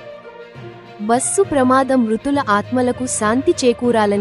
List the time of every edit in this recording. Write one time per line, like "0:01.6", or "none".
0:00.9